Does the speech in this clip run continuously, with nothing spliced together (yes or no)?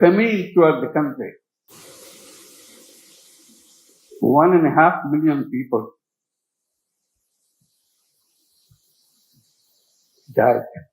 no